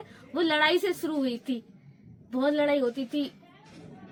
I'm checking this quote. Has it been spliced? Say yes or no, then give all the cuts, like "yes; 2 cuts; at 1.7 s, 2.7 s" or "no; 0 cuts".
no; 0 cuts